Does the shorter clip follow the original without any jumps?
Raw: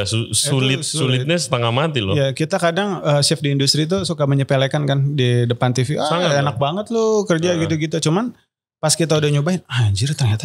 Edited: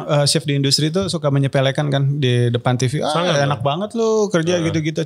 yes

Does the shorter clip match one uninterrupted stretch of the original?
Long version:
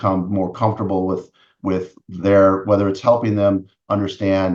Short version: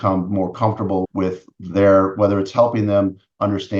no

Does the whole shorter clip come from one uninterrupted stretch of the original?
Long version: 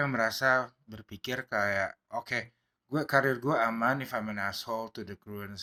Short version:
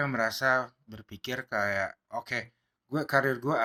yes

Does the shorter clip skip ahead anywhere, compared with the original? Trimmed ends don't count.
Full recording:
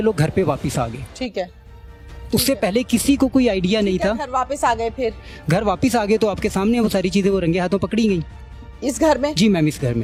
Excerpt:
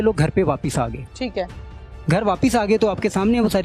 yes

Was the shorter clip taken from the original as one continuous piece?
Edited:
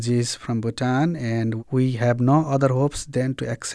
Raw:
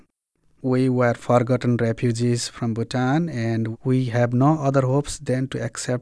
yes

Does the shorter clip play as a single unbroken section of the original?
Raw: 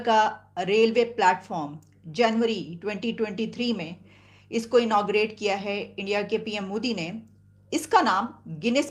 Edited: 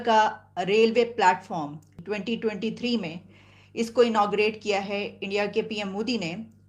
no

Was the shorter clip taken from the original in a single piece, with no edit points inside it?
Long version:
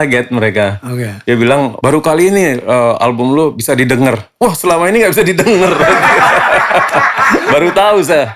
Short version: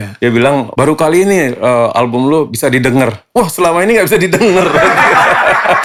yes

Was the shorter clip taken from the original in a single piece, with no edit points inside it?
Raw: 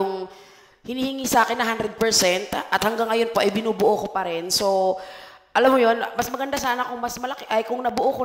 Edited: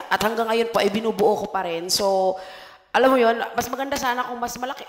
yes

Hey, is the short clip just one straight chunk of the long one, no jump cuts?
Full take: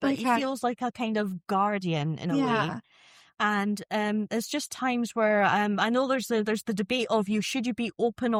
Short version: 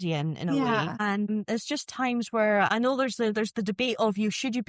no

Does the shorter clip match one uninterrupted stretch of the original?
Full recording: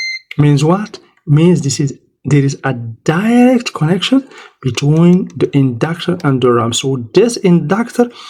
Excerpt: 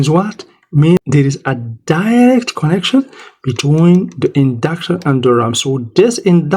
no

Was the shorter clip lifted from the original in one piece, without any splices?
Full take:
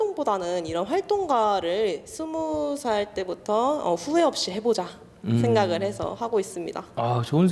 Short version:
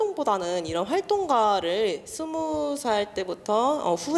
yes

